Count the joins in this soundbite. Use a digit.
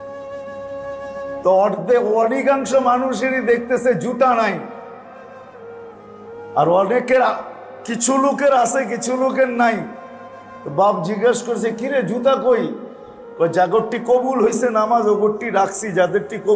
1